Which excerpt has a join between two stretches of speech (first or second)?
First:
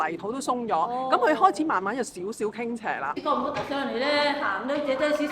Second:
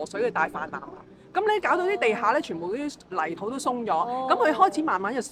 first